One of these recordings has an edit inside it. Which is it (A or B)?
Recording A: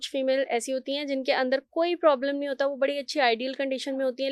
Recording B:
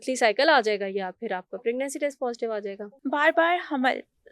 B